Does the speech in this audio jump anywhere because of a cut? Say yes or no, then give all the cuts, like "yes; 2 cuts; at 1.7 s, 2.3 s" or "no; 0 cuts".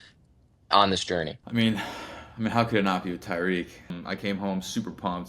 yes; 2 cuts; at 1.4 s, 4.0 s